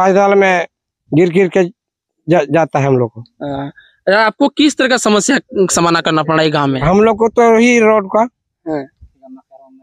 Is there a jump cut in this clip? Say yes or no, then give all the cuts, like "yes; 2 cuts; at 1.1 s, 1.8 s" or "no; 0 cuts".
no; 0 cuts